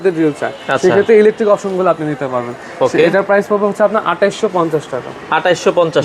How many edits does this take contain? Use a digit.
0